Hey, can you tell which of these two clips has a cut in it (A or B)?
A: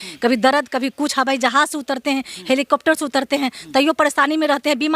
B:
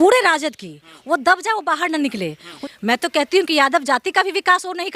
B